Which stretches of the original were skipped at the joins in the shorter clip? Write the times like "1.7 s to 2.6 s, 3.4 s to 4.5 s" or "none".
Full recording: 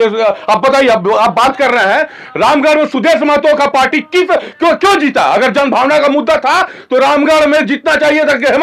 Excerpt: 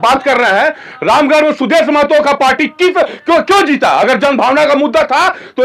none